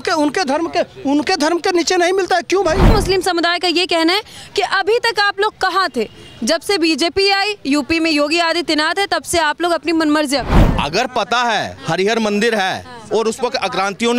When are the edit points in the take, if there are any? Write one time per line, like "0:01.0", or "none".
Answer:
0:02.9
0:10.6